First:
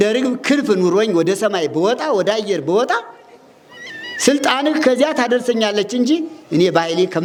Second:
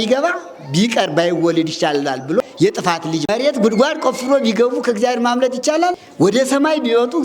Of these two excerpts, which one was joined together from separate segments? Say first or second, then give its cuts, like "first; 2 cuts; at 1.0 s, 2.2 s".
second; 2 cuts; at 2.5 s, 6.1 s